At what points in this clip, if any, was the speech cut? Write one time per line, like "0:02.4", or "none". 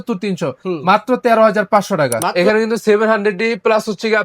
0:02.3